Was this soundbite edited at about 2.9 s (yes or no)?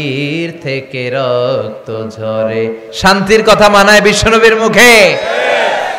yes